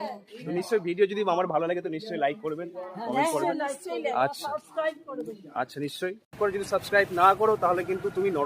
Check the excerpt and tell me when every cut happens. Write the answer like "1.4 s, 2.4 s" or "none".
6.4 s